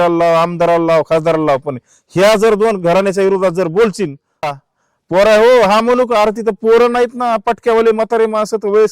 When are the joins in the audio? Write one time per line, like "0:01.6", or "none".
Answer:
0:04.5